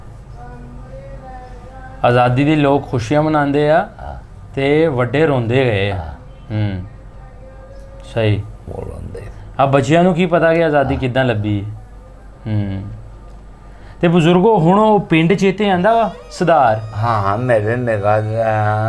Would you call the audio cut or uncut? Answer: uncut